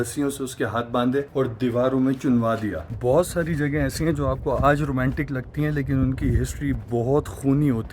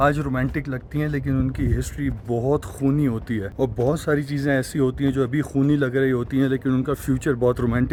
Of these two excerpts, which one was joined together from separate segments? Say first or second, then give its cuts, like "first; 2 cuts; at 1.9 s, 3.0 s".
first; 1 cut; at 2.9 s